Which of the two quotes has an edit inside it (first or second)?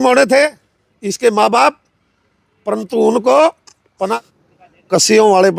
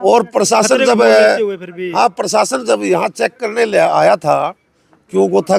first